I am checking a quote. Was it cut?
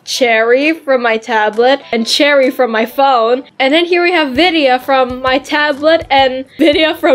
no; 0 cuts

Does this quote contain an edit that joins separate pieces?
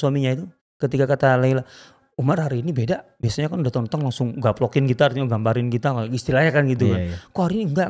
no; 0 cuts

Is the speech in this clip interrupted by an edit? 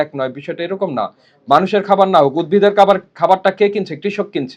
no; 0 cuts

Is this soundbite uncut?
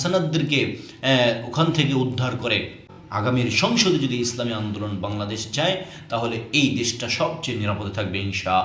no; 1 cut; at 2.9 s

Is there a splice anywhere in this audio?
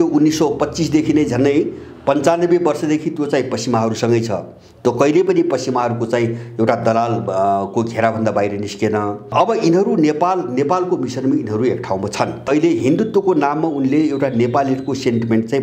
yes; 2 cuts; at 9.3 s, 12.5 s

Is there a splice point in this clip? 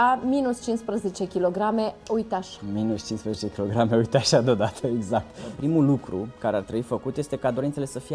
yes; 1 cut; at 5.5 s

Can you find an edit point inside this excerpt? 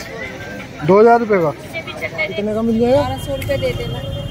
yes; 1 cut; at 2.4 s

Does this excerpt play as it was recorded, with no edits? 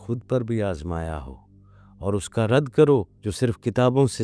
no; 1 cut; at 3.2 s

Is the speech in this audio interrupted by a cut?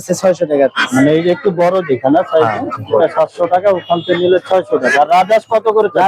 no; 0 cuts

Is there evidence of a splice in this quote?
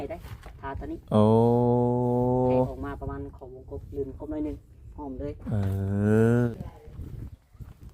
yes; 1 cut; at 6.5 s

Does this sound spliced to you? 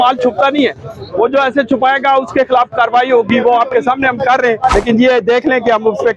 yes; 1 cut; at 4.7 s

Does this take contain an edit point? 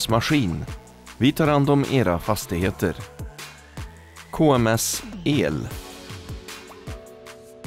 no; 0 cuts

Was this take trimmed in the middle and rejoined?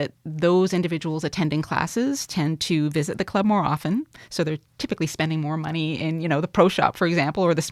no; 0 cuts

